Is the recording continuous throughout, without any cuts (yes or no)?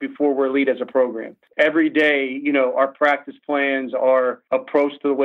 no